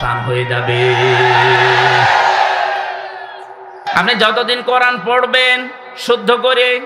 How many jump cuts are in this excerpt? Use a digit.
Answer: 1